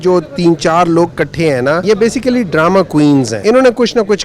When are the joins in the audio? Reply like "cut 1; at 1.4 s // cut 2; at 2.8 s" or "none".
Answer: cut 1; at 1.8 s // cut 2; at 3.3 s